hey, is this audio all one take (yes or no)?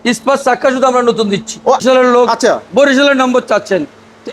no